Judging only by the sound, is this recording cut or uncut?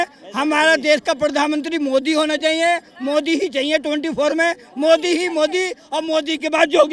uncut